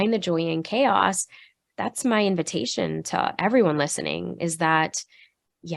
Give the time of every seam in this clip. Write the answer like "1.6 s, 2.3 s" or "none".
none